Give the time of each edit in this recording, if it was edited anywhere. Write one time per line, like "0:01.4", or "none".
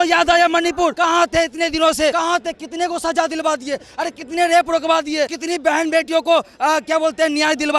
0:00.9
0:02.1
0:05.4